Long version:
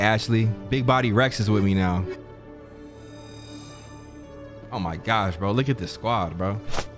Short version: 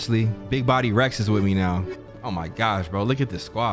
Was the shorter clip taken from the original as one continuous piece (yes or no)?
no